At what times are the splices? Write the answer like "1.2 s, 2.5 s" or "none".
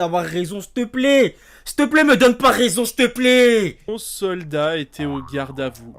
3.8 s